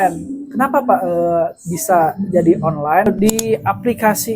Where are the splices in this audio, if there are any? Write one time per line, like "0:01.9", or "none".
0:03.1